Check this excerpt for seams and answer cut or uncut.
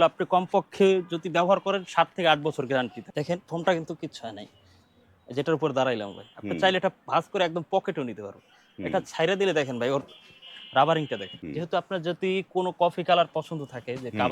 cut